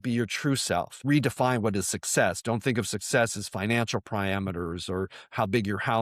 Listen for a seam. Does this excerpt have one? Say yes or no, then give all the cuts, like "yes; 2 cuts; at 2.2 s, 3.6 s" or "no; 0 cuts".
yes; 1 cut; at 1.0 s